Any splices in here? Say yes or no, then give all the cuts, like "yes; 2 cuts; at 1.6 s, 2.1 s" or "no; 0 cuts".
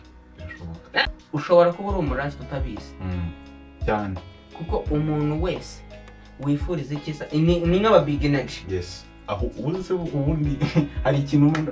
yes; 1 cut; at 1.1 s